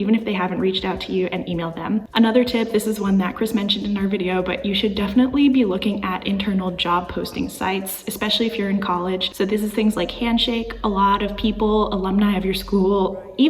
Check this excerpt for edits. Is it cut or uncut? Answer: uncut